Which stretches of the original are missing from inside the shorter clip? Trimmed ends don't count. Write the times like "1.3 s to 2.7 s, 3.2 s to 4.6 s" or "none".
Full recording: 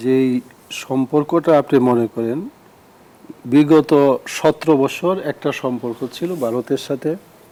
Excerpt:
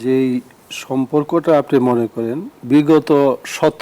2.5 s to 3.3 s